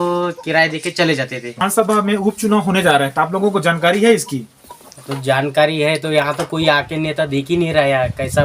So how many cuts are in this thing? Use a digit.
1